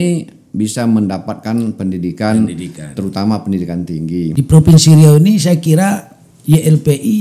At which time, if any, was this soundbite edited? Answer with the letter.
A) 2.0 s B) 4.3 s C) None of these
B